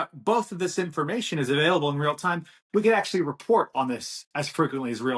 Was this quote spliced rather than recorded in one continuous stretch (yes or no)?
no